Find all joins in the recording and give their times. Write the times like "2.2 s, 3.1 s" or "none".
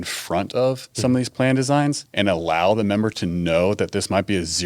0.9 s, 2.1 s